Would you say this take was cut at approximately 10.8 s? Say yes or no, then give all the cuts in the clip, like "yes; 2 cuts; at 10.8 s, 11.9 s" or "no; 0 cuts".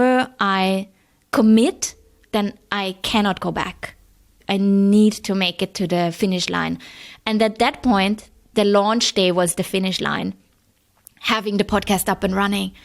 no; 2 cuts; at 2.2 s, 4.3 s